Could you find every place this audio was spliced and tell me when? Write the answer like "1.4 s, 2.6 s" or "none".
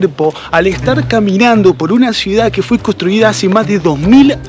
none

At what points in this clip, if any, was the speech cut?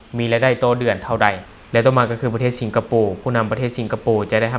1.4 s

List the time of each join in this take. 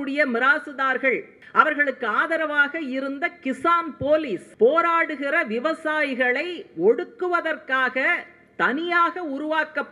1.4 s, 4.5 s

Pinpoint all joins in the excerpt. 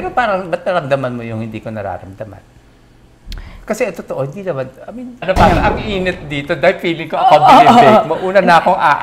5.2 s

